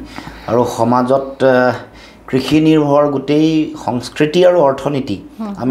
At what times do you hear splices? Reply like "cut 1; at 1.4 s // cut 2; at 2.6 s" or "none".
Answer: none